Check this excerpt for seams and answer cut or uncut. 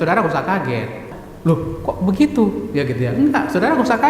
cut